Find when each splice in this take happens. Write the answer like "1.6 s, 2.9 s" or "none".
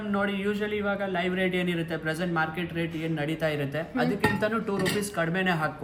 none